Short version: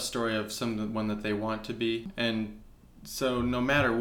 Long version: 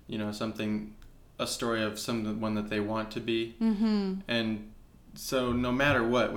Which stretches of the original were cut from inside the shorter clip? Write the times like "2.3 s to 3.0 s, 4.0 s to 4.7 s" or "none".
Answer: 3.5 s to 4.2 s